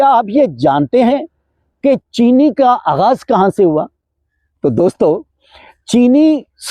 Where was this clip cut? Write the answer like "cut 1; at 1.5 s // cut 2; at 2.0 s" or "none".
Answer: none